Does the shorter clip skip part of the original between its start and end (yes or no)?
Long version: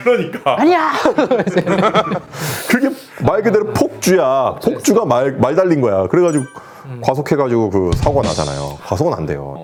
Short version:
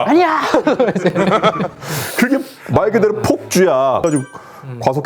yes